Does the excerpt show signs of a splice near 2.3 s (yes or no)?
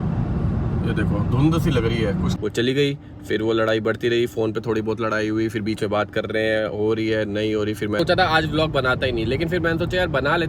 yes